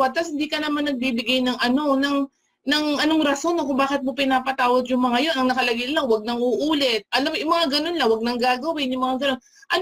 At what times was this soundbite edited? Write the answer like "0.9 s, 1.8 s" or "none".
7.0 s